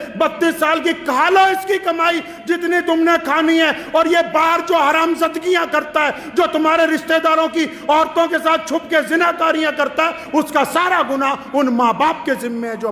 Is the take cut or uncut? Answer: uncut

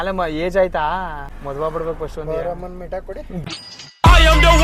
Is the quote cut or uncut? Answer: cut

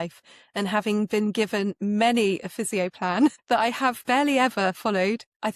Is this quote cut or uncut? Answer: uncut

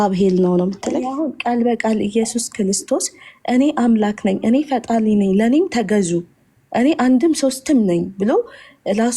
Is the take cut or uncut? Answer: cut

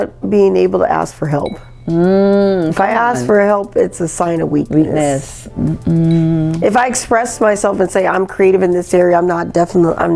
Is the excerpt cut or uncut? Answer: uncut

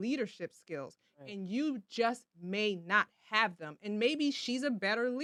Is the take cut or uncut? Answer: uncut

